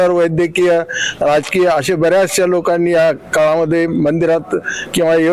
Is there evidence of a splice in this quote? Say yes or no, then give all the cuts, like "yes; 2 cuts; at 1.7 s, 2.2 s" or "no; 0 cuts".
no; 0 cuts